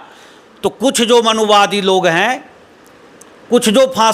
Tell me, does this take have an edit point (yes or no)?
no